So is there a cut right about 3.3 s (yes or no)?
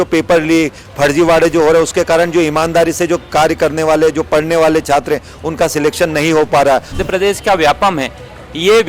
no